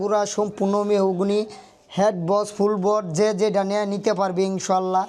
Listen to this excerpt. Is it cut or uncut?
uncut